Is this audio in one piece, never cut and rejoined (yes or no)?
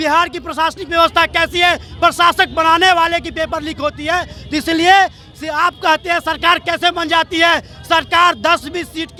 yes